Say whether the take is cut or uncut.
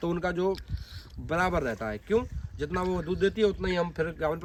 uncut